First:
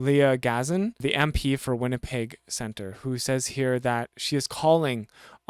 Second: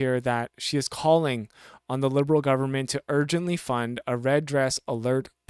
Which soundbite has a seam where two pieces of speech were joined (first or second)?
first